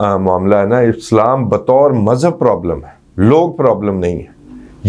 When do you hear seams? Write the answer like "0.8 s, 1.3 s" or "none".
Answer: none